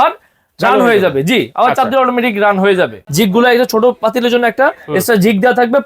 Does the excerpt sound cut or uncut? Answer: cut